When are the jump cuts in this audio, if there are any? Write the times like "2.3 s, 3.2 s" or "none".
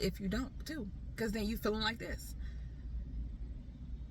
none